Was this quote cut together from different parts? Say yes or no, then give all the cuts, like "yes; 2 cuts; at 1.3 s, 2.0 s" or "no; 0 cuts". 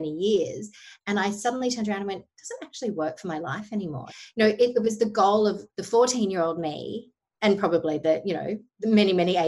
yes; 1 cut; at 4.1 s